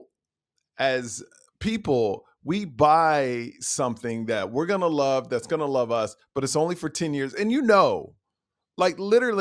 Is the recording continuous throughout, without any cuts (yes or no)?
yes